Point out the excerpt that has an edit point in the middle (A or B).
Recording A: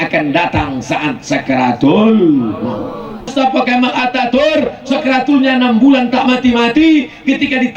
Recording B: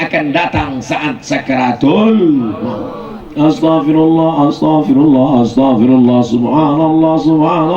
A